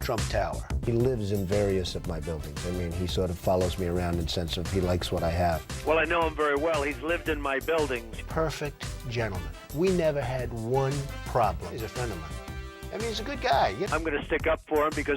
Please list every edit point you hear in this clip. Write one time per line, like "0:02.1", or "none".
0:00.8
0:13.9

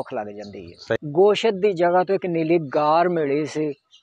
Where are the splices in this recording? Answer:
0:01.0

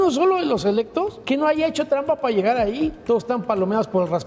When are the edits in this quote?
0:01.2
0:03.0

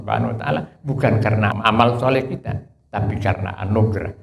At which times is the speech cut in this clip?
0:01.5

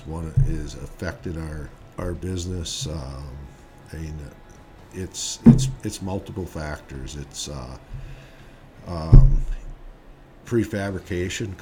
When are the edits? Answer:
0:01.8

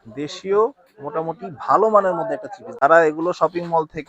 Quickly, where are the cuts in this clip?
0:02.8

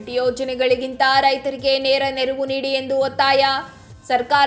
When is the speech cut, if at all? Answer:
none

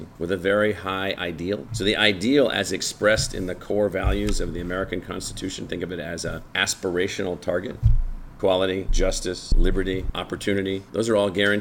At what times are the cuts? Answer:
none

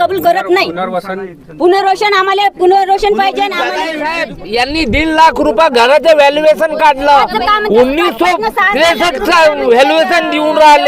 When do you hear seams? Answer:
0:04.0

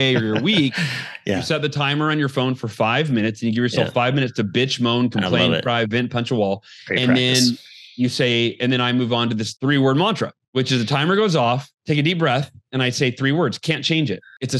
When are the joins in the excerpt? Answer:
0:09.5

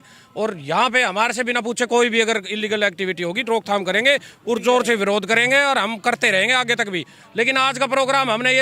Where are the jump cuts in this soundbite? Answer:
none

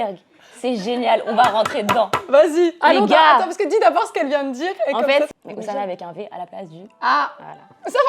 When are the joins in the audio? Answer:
0:05.3

